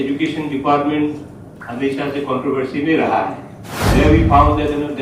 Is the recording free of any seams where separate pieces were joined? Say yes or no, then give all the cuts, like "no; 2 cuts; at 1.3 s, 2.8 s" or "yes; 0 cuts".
no; 1 cut; at 4.0 s